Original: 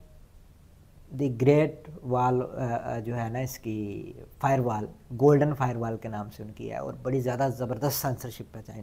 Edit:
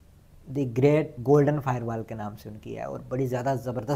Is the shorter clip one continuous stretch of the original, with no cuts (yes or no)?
no